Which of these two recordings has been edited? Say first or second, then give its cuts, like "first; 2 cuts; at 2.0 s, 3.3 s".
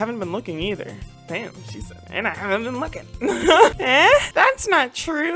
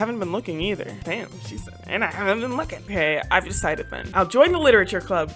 second; 3 cuts; at 1.0 s, 2.9 s, 4.0 s